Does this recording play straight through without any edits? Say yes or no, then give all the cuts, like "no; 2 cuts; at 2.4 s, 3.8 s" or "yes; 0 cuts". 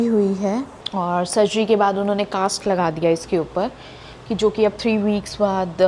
yes; 0 cuts